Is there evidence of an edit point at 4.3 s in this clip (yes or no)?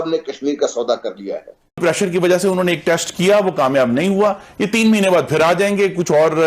no